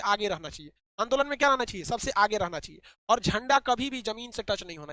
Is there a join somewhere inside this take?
no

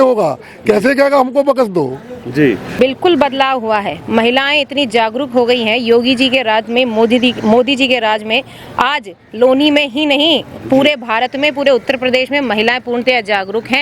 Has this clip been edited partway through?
yes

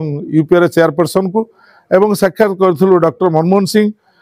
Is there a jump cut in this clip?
no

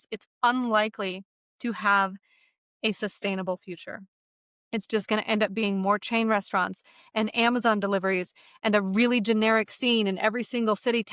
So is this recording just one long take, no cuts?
yes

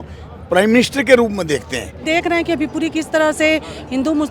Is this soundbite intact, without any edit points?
no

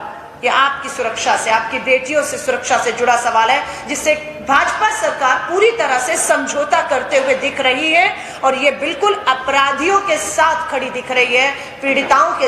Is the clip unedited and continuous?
yes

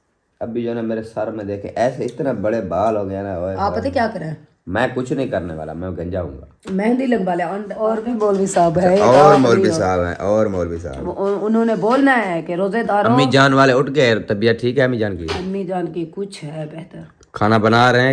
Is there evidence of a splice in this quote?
yes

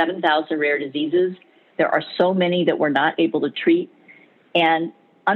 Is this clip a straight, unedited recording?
yes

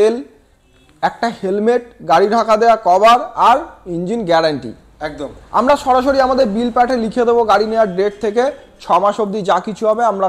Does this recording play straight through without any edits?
yes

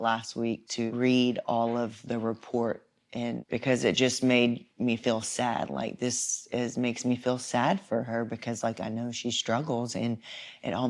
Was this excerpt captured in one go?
no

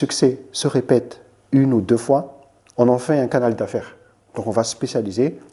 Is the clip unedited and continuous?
yes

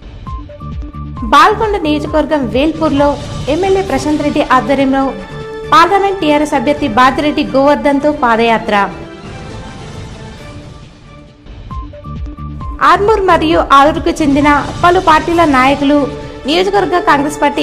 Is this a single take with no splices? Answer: no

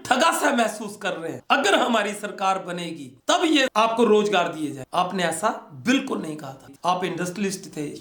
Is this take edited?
yes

